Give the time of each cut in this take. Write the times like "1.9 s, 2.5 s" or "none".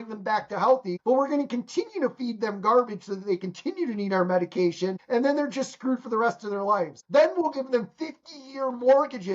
0.9 s, 5.0 s, 7.0 s